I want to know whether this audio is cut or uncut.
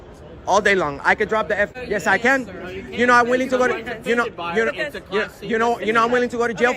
cut